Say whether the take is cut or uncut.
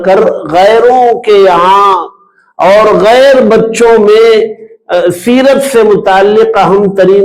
uncut